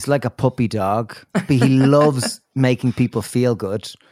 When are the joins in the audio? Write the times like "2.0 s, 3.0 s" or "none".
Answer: 1.4 s

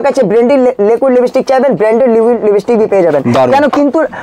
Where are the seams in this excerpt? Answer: none

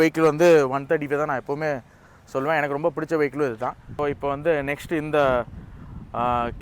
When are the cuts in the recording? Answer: 3.9 s

